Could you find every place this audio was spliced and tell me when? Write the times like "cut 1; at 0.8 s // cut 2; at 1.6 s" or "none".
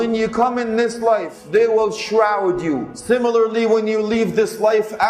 cut 1; at 1.3 s // cut 2; at 2.9 s